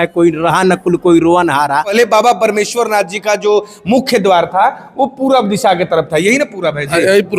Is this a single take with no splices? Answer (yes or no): no